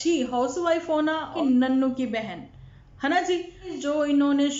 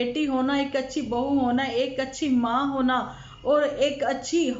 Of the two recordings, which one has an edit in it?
first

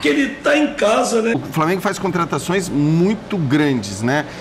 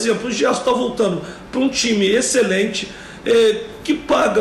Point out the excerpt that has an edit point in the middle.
first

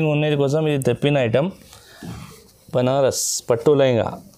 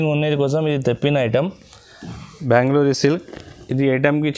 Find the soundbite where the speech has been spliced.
second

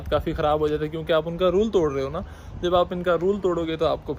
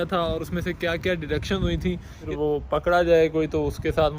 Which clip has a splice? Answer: second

